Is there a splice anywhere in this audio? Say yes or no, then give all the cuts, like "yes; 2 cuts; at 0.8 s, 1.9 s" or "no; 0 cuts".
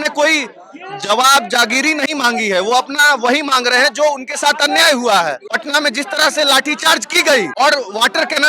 yes; 2 cuts; at 5.5 s, 7.5 s